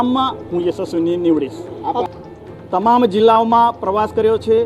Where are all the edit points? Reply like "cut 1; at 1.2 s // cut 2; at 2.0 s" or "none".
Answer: cut 1; at 2.0 s